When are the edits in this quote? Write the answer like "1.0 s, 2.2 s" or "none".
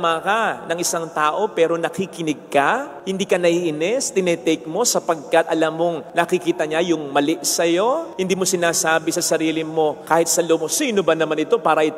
6.0 s, 10.0 s